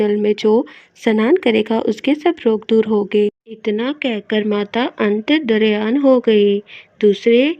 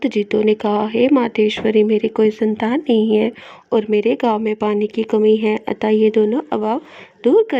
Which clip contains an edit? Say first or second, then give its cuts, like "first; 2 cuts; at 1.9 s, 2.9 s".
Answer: first; 1 cut; at 3.5 s